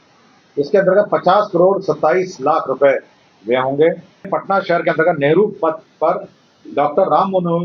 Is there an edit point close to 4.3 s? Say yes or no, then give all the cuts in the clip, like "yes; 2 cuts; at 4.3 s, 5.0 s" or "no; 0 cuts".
yes; 1 cut; at 4.3 s